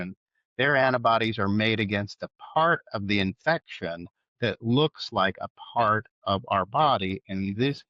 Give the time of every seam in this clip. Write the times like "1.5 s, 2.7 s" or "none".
none